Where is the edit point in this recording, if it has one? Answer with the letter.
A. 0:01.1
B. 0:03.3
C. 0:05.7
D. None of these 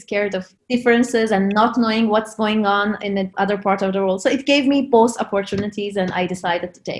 B